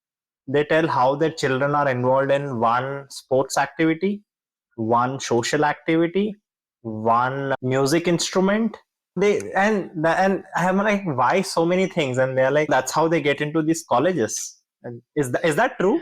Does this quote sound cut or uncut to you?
uncut